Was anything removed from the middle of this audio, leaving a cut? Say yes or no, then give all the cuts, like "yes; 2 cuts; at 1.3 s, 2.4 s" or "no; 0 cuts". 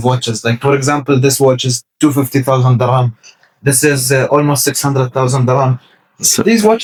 no; 0 cuts